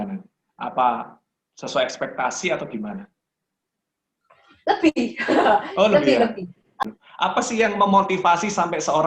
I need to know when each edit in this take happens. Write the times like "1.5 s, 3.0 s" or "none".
6.8 s